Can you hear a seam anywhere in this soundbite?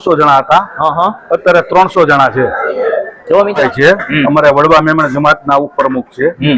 yes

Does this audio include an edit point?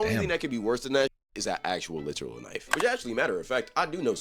no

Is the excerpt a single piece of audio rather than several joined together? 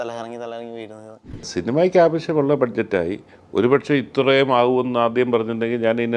no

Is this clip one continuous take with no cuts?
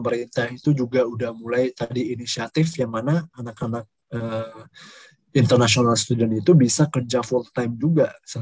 yes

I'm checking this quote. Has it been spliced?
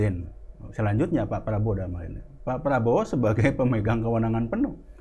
no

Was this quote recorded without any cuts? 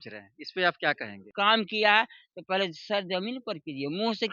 no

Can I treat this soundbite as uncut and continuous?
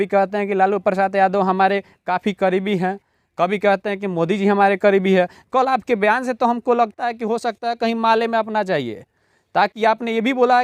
yes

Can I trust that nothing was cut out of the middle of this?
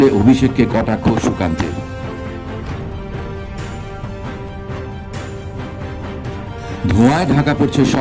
yes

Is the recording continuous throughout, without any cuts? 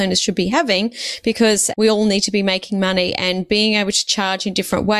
no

